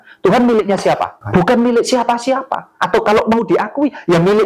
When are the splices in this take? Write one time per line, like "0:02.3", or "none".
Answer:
0:01.2